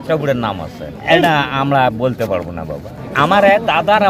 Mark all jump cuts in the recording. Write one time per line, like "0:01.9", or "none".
0:01.0
0:03.1